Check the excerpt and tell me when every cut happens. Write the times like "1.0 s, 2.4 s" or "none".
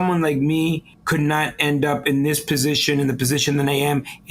0.9 s